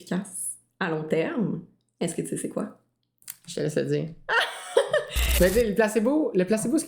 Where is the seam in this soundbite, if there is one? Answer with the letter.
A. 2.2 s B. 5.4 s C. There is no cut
B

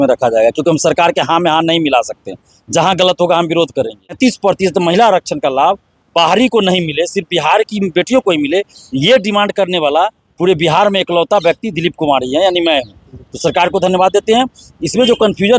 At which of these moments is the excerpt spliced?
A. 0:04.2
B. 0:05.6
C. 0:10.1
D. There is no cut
A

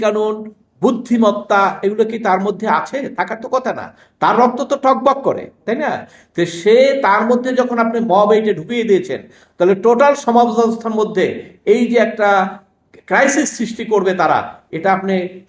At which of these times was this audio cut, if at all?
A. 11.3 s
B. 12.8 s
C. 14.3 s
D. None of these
D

